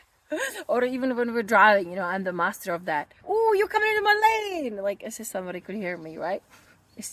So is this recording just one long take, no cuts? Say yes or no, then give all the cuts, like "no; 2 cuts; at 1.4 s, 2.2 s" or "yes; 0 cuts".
no; 1 cut; at 3.1 s